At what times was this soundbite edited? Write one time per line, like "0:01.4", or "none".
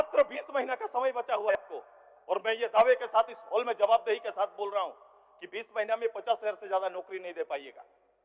0:01.5